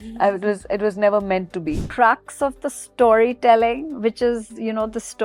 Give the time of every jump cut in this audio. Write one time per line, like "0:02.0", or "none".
0:01.8

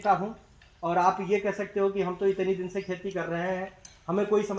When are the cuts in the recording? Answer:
none

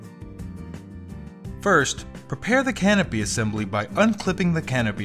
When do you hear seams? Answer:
0:01.5

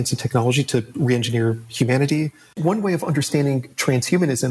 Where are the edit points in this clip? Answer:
0:02.5

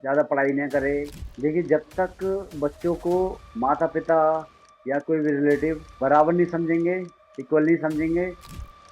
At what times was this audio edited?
0:01.2
0:05.9

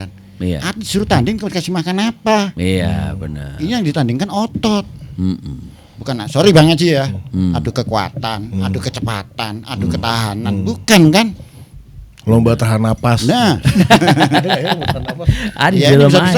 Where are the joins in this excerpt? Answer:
none

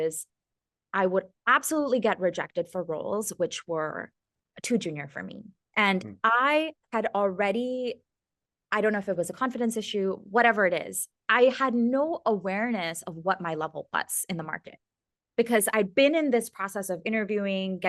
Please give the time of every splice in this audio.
none

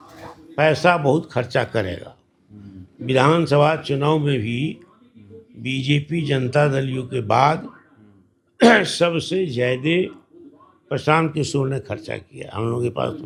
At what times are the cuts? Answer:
none

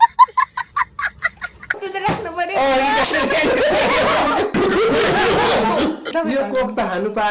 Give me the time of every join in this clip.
0:01.8
0:06.1

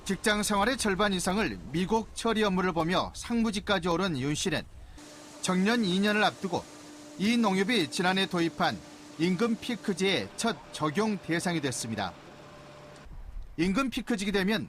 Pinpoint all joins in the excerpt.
0:02.1

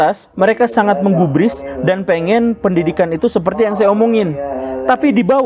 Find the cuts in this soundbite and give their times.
none

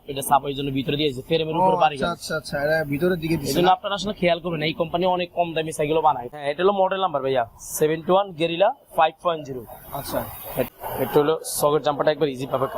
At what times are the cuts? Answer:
0:06.3
0:10.8

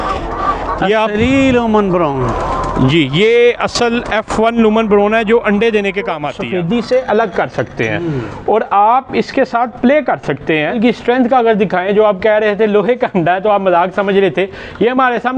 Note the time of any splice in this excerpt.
0:06.3
0:10.8

